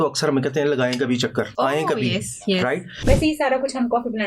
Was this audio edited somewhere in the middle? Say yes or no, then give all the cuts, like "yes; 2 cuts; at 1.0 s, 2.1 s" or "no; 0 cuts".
yes; 2 cuts; at 1.5 s, 2.9 s